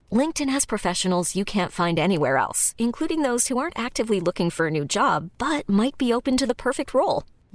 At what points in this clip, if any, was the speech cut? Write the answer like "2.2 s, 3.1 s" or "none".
none